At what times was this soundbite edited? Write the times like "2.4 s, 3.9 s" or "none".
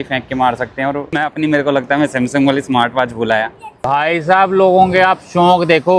1.2 s, 3.6 s